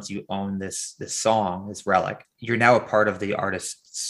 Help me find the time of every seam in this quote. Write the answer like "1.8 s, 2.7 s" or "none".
2.3 s